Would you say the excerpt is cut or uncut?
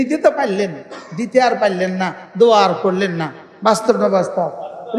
uncut